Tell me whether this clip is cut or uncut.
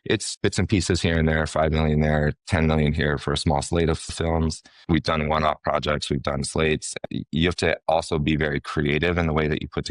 cut